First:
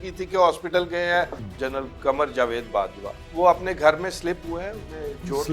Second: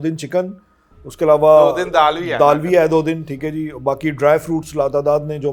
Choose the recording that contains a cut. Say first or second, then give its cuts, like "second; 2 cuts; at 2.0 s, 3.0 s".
first; 2 cuts; at 1.4 s, 3.2 s